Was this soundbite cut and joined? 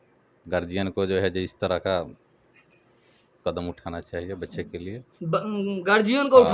no; 0 cuts

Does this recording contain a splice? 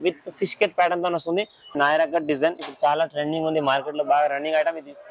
yes; 1 cut; at 1.6 s

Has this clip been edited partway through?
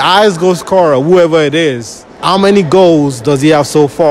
yes; 1 cut; at 2.1 s

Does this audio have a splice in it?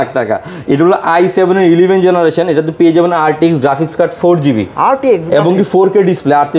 no; 0 cuts

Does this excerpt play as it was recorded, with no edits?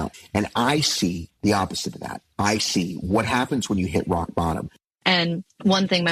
no; 2 cuts; at 1.3 s, 5.1 s

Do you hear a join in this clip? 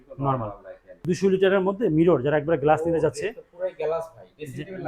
yes; 1 cut; at 1.0 s

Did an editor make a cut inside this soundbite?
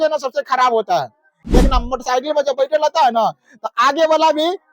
yes; 1 cut; at 1.4 s

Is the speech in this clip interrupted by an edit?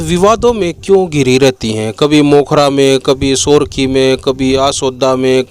no; 0 cuts

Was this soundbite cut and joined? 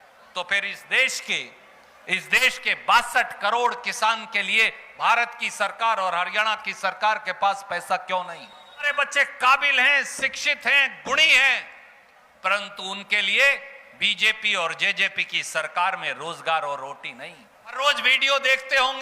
yes; 2 cuts; at 8.9 s, 17.8 s

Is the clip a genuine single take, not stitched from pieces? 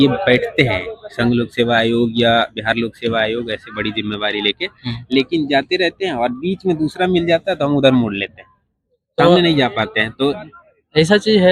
yes; 0 cuts

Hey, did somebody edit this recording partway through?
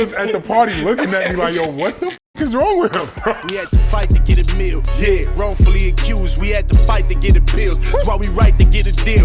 yes; 1 cut; at 3.6 s

